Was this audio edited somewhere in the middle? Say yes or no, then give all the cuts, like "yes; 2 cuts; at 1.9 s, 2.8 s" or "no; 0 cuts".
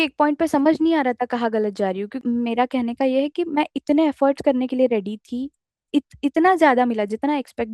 yes; 2 cuts; at 2.2 s, 5.8 s